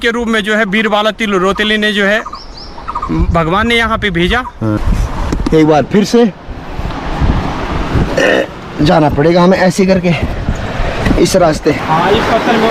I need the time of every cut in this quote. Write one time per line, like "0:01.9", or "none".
0:04.8
0:11.8

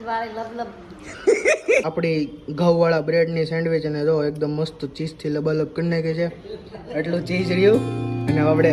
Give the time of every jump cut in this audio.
0:01.0
0:01.9

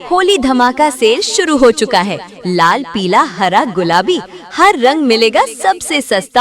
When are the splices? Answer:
0:02.2

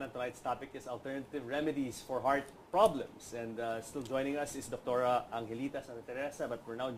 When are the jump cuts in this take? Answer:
0:04.3

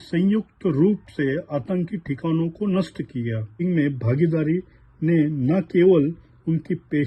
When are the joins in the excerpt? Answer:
0:03.6

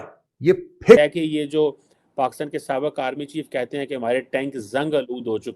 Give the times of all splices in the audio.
0:01.0

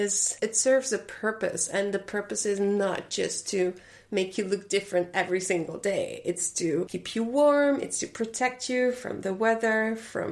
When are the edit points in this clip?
0:07.0

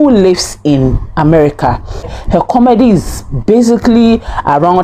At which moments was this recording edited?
0:02.2

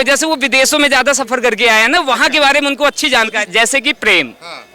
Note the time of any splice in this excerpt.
0:03.4

